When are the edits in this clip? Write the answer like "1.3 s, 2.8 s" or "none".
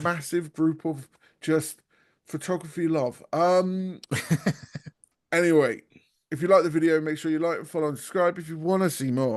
none